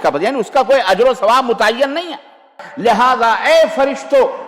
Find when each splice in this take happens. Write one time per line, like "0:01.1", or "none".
0:02.6